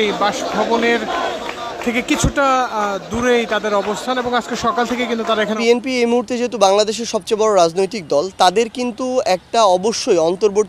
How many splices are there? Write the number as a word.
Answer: one